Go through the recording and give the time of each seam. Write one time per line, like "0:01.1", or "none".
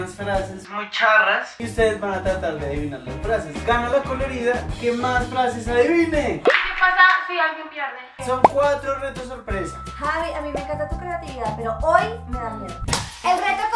0:01.6
0:06.4
0:08.1
0:12.9